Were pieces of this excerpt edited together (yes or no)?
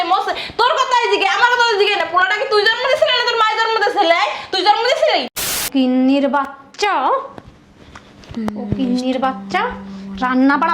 yes